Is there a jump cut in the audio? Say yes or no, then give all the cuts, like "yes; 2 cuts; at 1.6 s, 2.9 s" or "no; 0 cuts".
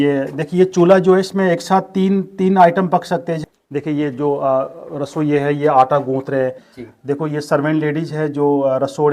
yes; 2 cuts; at 3.4 s, 6.7 s